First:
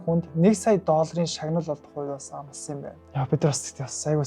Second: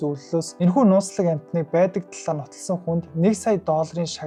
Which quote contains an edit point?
first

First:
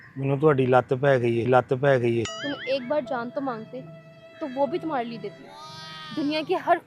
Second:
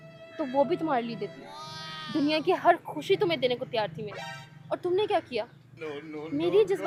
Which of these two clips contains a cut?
first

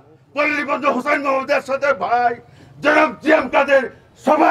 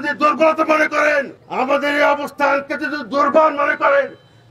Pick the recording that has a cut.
second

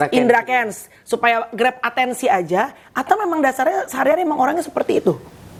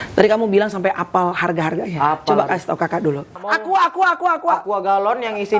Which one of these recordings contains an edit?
second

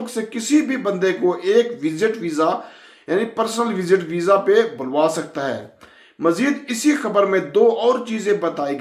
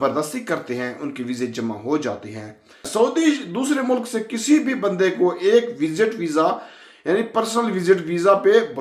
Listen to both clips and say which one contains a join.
second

